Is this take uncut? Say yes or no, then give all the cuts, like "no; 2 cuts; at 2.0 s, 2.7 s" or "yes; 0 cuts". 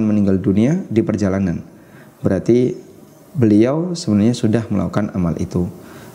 yes; 0 cuts